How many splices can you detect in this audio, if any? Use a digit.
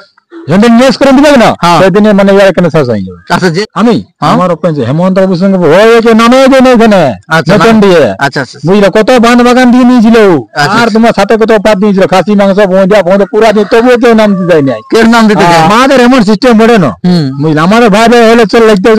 2